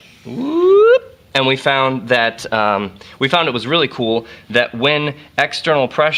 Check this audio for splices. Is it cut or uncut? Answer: uncut